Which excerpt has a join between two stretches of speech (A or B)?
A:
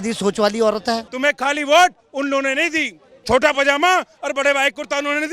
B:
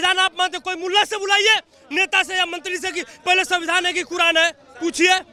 A